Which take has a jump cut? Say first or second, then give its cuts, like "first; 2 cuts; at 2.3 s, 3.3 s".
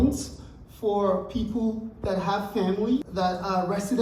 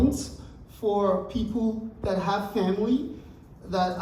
first; 1 cut; at 3.1 s